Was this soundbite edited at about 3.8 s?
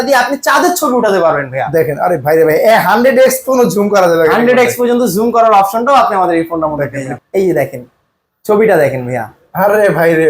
no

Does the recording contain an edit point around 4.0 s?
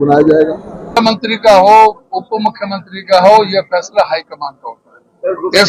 no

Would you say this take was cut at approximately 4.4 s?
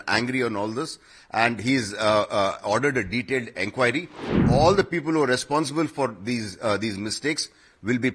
yes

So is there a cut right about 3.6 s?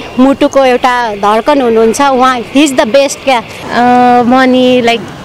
yes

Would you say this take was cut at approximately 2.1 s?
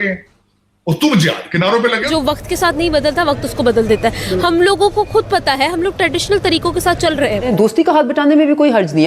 yes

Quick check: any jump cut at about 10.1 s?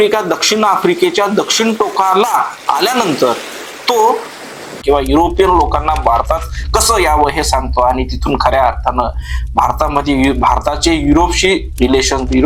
no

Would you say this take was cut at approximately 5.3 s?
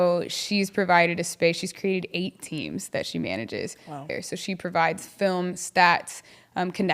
no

